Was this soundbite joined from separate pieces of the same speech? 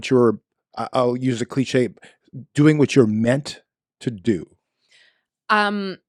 no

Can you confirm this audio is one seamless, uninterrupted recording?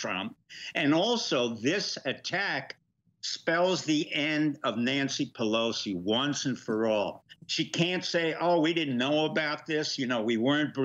yes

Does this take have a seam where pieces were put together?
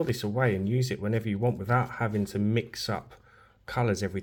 no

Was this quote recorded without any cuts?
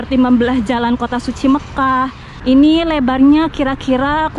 no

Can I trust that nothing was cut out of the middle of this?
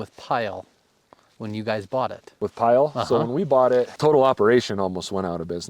no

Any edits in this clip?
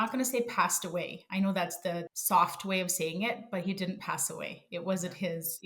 yes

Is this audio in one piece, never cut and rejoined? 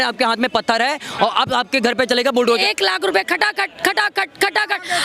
no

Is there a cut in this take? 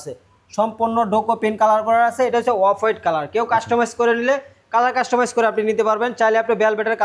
no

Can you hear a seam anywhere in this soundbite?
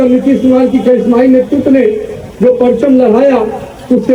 no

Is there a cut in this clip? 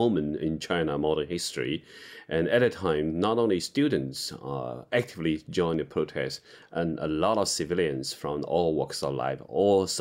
no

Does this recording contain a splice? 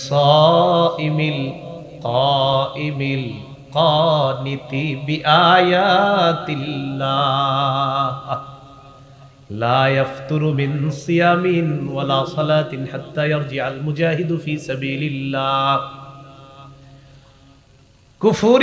no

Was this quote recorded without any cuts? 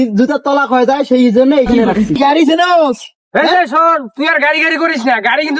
no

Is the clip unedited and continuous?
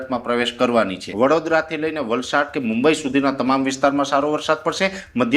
no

